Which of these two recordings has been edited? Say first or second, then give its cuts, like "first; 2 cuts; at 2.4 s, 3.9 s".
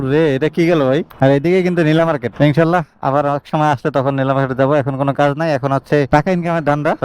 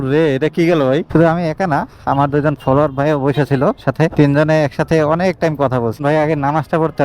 second; 2 cuts; at 1.1 s, 6.0 s